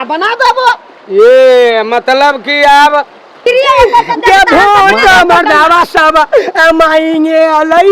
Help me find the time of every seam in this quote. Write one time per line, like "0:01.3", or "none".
0:03.5